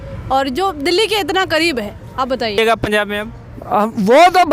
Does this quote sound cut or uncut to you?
cut